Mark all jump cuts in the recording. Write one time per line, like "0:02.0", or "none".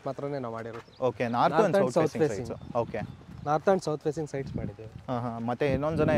none